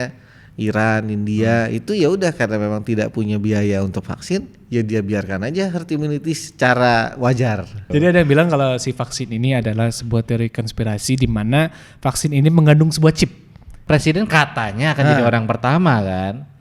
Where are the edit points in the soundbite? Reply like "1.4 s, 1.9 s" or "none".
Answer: 7.9 s, 13.8 s